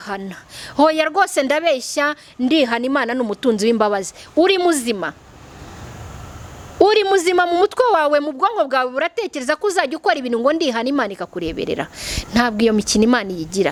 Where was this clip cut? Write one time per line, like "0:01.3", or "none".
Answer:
none